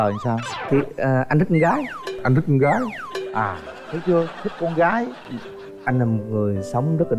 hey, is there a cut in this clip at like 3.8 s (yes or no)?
no